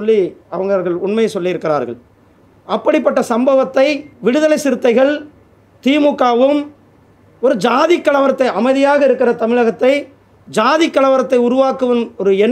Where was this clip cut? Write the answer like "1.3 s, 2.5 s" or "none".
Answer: 4.1 s